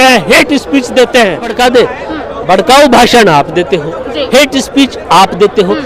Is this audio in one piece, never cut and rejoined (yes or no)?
no